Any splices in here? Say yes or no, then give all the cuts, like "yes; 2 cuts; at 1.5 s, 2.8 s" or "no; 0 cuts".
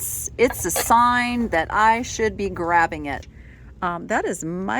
yes; 1 cut; at 3.3 s